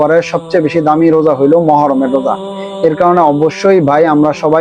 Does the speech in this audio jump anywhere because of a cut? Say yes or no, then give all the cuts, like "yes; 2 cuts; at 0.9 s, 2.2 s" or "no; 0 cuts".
no; 0 cuts